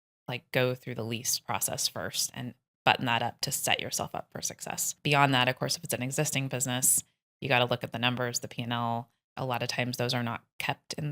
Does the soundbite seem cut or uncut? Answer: cut